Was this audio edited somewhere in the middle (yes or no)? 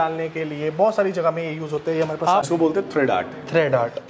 yes